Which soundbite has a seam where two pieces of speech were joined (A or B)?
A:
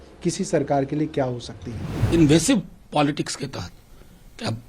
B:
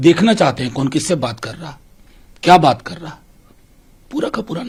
A